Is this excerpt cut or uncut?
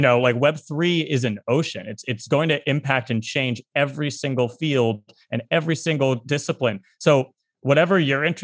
uncut